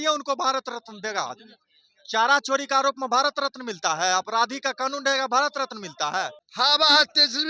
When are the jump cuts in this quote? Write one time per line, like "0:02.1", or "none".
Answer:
0:06.4